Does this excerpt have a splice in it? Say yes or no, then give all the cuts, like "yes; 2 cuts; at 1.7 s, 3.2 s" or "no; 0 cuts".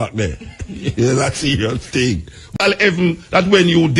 yes; 1 cut; at 2.5 s